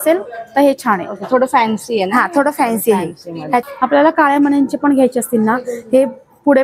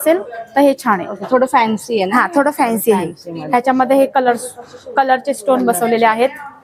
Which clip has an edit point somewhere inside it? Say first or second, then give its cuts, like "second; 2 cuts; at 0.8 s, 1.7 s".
first; 1 cut; at 3.6 s